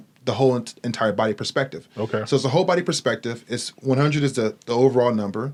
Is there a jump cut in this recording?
no; 0 cuts

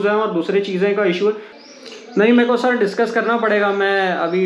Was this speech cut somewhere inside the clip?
yes; 1 cut; at 1.5 s

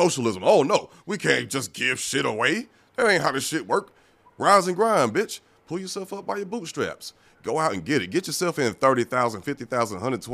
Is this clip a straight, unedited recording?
yes; 0 cuts

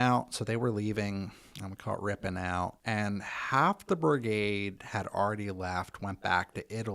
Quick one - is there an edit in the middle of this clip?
yes; 1 cut; at 2.8 s

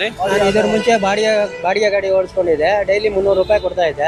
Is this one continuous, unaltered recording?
yes; 0 cuts

